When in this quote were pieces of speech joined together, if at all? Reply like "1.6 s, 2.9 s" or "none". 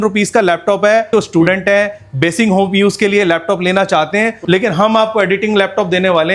1.1 s, 4.4 s